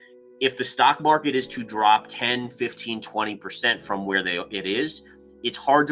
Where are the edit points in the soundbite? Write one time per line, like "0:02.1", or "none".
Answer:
none